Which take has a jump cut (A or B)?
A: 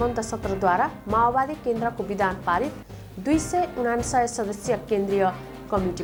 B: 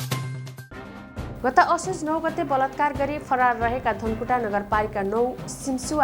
B